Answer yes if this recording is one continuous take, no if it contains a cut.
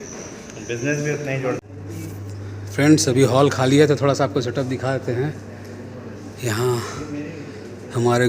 no